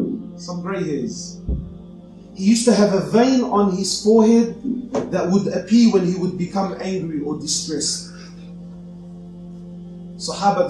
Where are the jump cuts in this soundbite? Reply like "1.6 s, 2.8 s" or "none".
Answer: none